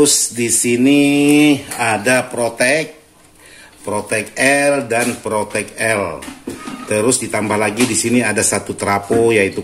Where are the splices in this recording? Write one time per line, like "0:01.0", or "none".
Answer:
none